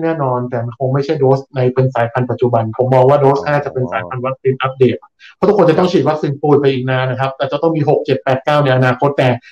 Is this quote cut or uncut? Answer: uncut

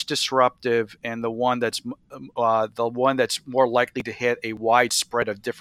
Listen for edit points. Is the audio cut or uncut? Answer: uncut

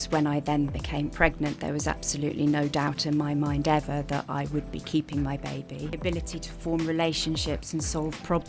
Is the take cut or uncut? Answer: cut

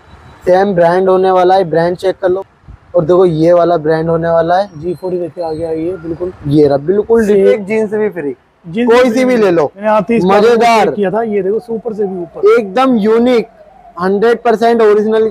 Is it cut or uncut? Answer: cut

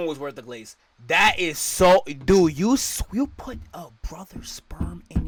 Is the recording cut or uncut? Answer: uncut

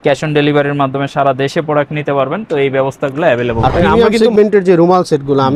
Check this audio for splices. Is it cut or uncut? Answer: cut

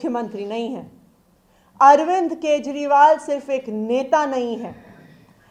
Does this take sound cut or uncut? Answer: uncut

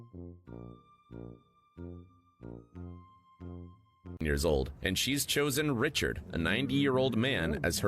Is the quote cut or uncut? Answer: cut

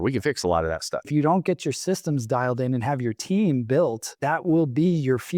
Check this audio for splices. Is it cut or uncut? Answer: cut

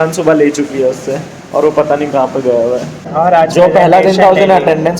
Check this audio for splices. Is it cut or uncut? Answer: cut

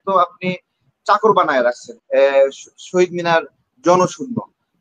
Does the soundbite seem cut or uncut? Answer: cut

